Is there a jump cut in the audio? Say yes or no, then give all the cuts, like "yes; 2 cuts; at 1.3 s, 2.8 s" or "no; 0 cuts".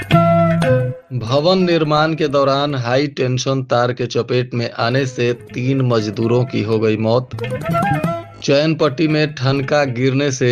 yes; 1 cut; at 1.0 s